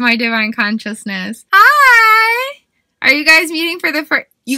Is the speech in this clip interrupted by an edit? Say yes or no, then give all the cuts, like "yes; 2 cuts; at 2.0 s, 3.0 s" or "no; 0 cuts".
yes; 1 cut; at 1.4 s